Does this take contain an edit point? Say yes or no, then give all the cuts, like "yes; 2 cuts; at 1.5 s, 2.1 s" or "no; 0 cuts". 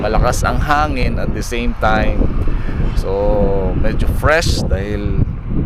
no; 0 cuts